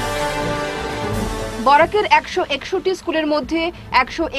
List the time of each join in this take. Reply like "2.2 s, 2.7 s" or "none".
1.0 s

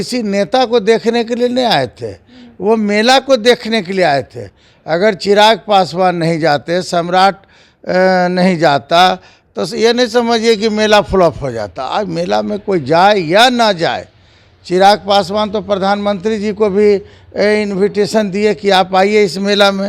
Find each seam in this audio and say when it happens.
none

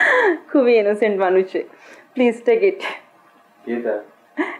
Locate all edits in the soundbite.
none

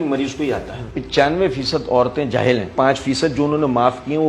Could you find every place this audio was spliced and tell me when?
1.0 s, 2.7 s

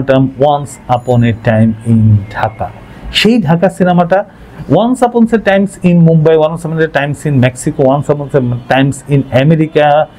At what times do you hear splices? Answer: none

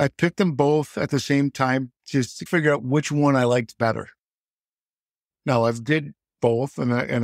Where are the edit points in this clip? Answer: none

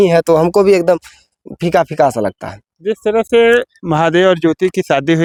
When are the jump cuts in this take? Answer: none

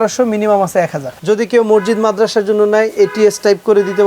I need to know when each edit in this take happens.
1.1 s

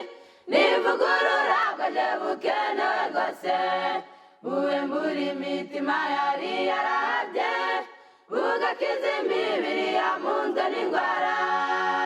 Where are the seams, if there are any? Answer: 1.7 s, 3.9 s

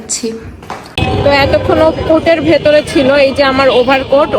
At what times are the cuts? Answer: 1.0 s

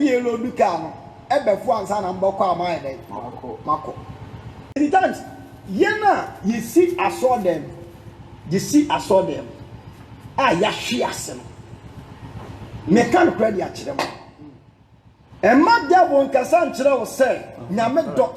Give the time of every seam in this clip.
4.8 s

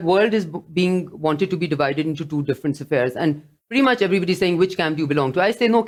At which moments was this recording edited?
none

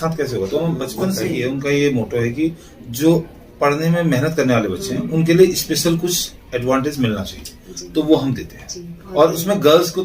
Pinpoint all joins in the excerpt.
1.3 s

